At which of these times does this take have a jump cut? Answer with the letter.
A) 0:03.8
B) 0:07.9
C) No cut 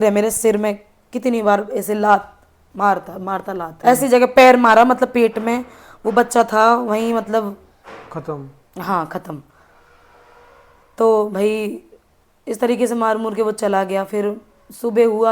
A